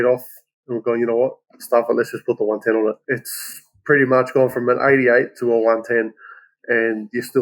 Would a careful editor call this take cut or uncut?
cut